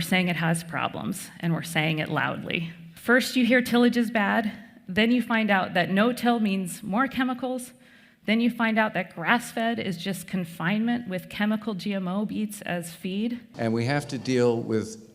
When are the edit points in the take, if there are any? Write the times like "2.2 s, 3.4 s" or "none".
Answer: 2.8 s, 13.5 s